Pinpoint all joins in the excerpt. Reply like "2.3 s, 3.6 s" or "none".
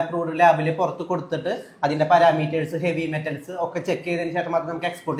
none